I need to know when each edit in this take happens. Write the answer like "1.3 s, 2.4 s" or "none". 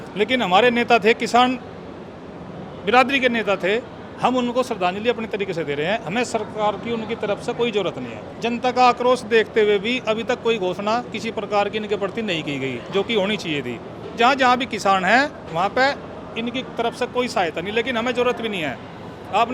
8.2 s, 14.0 s